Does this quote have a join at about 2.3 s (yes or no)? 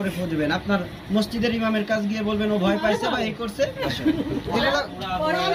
no